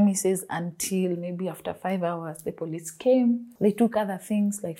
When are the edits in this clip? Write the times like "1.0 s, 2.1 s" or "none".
none